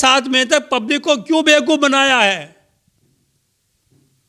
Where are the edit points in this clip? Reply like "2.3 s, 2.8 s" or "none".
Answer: none